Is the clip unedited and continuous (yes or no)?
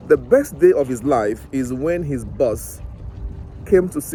yes